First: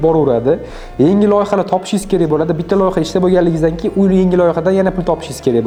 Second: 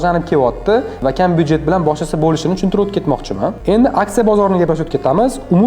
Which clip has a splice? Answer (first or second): second